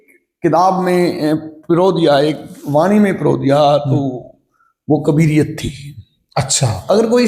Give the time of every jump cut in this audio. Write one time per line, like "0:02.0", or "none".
none